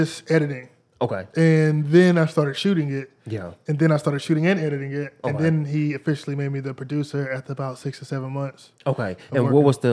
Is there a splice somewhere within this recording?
no; 0 cuts

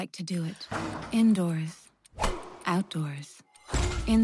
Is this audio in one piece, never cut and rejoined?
yes; 0 cuts

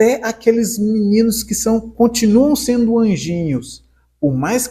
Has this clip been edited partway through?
no; 0 cuts

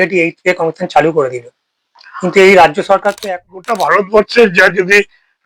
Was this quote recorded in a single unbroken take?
no; 1 cut; at 3.1 s

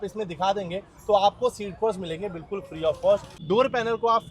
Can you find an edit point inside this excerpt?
yes; 1 cut; at 3.3 s

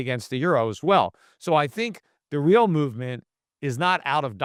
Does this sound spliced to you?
no; 0 cuts

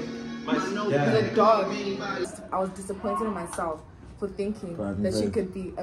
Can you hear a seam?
yes; 1 cut; at 2.3 s

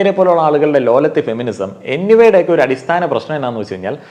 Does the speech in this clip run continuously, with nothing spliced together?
yes; 0 cuts

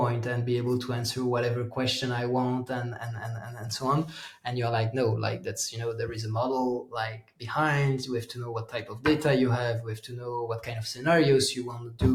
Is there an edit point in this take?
no; 0 cuts

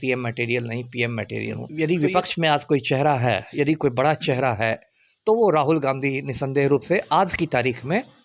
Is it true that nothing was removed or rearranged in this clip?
no; 1 cut; at 1.6 s

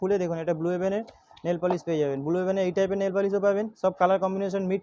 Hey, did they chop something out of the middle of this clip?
no; 0 cuts

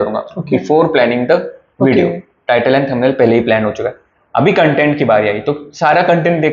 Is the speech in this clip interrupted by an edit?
no; 0 cuts

